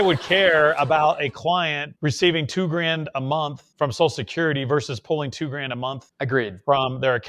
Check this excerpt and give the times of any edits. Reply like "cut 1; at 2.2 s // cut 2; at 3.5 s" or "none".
cut 1; at 1.9 s // cut 2; at 3.6 s // cut 3; at 6.1 s